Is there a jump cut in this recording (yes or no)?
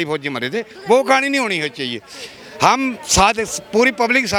no